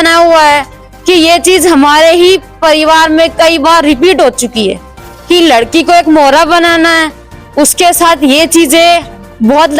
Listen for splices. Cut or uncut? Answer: uncut